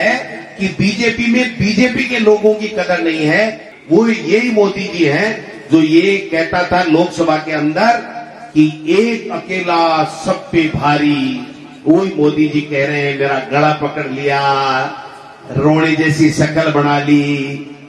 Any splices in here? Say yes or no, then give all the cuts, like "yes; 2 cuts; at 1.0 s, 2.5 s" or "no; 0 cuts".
yes; 1 cut; at 3.7 s